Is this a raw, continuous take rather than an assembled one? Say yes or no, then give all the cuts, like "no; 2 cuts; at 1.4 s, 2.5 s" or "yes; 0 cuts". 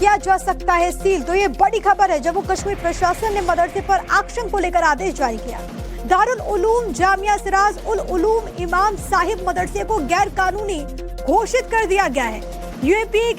no; 1 cut; at 3.2 s